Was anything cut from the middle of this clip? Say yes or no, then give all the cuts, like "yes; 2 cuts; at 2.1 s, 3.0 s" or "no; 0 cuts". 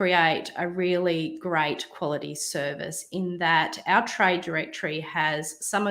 no; 0 cuts